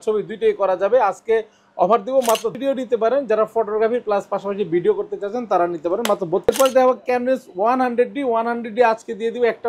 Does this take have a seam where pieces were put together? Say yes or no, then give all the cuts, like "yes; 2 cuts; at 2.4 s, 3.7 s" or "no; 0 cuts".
yes; 2 cuts; at 2.5 s, 6.5 s